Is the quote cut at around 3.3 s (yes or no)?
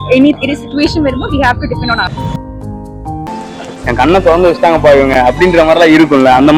yes